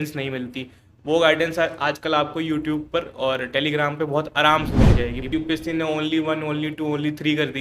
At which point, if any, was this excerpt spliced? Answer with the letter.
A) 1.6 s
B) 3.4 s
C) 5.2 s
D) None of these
C